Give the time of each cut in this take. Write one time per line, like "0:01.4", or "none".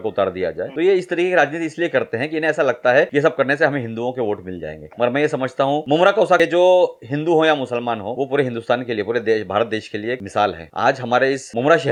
none